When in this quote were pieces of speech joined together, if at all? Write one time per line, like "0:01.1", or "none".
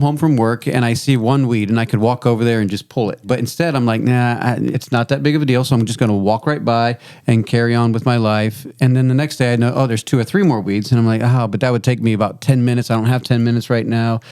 0:03.3
0:04.8